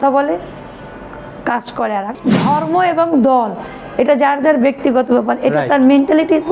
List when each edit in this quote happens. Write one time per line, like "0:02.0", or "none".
0:02.1